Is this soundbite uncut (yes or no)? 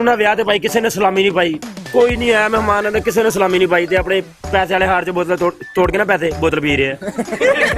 yes